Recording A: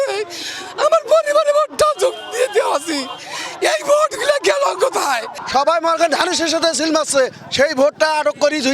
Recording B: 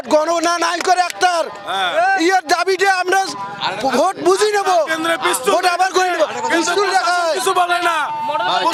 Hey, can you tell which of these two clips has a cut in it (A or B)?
A